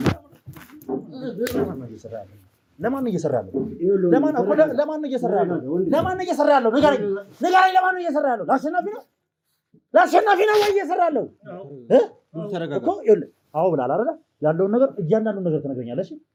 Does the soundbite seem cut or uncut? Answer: uncut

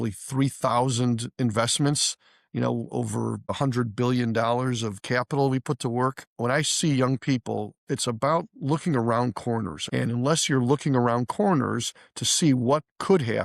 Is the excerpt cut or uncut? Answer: cut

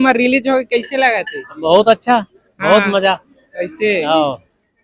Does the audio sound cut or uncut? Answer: uncut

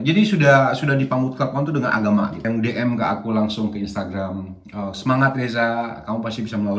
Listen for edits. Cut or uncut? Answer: cut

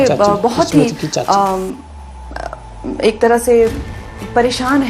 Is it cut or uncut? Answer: uncut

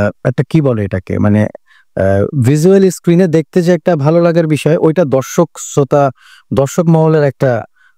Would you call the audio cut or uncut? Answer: uncut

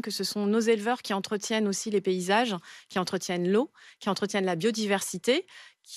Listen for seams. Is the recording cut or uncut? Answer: uncut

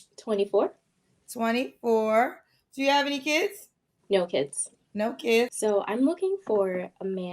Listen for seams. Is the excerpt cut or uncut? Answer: cut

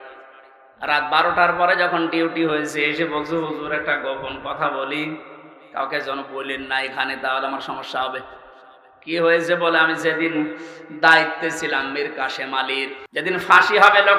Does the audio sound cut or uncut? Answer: cut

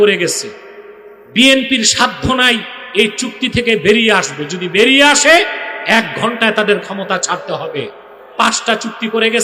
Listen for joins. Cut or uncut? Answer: uncut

